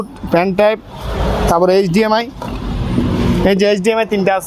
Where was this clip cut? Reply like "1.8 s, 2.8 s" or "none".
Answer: none